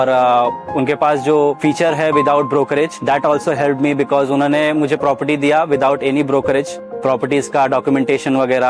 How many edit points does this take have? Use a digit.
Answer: 3